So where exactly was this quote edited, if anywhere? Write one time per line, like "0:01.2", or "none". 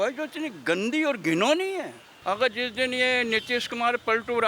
0:02.0